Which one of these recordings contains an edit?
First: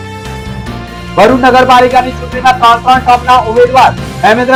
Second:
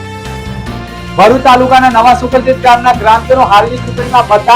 second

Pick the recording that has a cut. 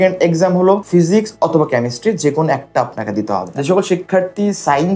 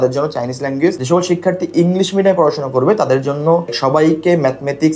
first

